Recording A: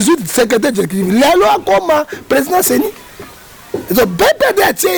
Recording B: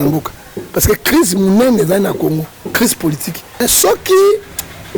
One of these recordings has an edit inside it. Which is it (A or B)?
B